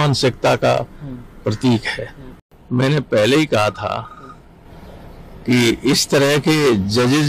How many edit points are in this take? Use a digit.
1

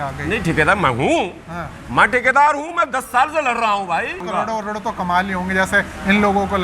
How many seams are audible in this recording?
1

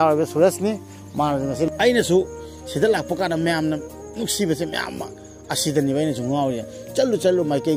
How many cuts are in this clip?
1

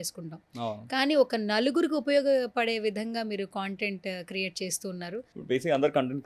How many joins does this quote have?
1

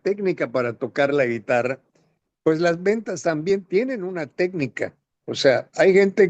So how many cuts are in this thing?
0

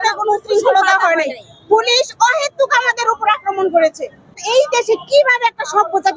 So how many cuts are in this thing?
1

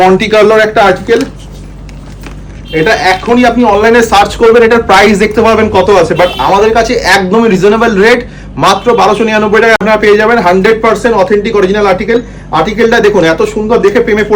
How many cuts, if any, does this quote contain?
0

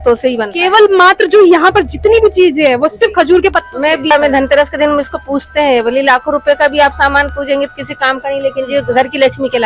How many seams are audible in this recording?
1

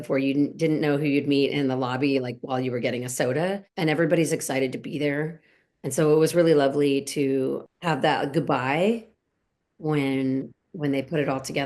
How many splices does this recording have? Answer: 2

